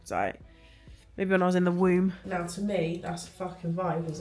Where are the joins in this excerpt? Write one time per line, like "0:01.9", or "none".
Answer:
0:02.2